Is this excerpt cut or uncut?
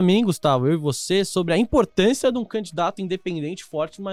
uncut